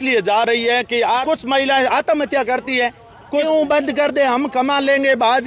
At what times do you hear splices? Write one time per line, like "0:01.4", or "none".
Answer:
0:01.2
0:03.2